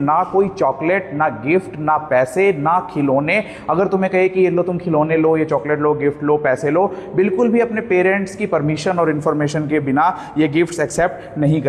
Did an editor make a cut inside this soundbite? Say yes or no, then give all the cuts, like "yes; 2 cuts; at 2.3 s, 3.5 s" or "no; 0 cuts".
no; 0 cuts